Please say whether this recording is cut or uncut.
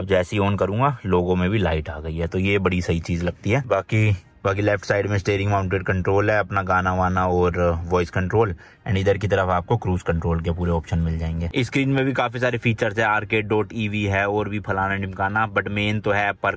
uncut